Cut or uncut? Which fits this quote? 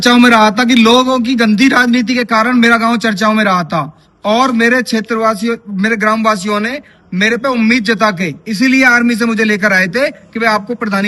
uncut